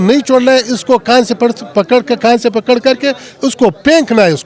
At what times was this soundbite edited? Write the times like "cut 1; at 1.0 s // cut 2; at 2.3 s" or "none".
none